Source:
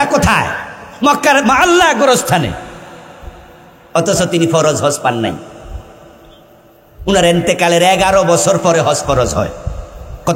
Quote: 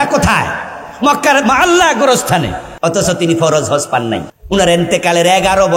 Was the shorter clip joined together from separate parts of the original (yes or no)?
yes